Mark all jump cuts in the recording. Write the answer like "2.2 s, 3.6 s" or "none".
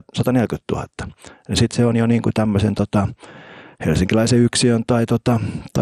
none